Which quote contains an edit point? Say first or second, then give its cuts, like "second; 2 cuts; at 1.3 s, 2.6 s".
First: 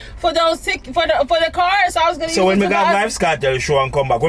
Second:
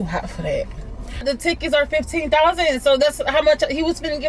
second; 1 cut; at 1.2 s